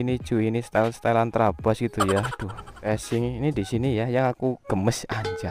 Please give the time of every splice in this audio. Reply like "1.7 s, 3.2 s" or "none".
2.9 s